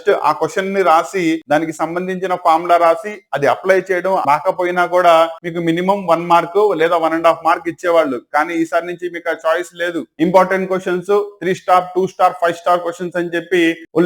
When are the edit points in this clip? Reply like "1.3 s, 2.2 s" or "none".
4.2 s, 5.5 s, 10.0 s